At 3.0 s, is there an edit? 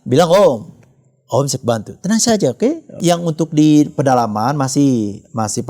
yes; 1 cut; at 3.0 s

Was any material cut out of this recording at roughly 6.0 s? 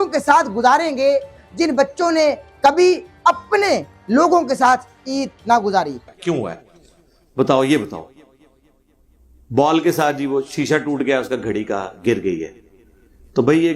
yes; 1 cut; at 6.0 s

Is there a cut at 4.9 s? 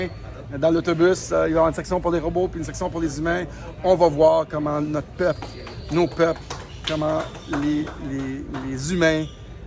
no; 0 cuts

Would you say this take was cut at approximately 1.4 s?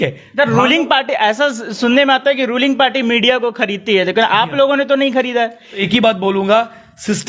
no; 1 cut; at 5.9 s

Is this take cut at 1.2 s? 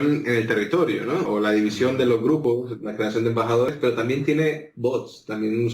yes; 1 cut; at 1.2 s

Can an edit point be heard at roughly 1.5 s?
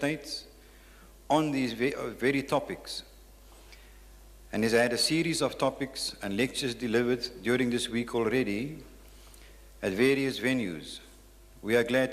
yes; 1 cut; at 1.5 s

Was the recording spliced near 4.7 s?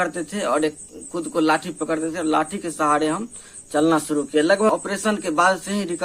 yes; 1 cut; at 4.7 s

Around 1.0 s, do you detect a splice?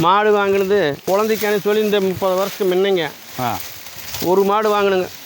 yes; 1 cut; at 1.0 s

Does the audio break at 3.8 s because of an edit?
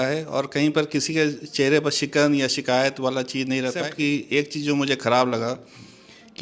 yes; 1 cut; at 3.8 s

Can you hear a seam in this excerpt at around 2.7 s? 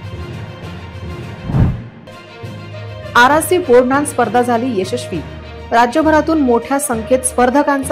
no; 1 cut; at 1.1 s

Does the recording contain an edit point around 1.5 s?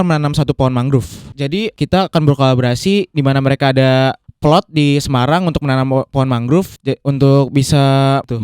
yes; 3 cuts; at 1.5 s, 4.3 s, 6.7 s

